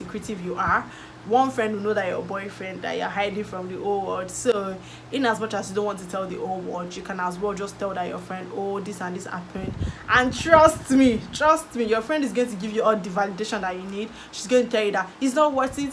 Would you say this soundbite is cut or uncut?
uncut